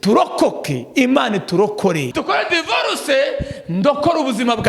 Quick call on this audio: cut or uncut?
cut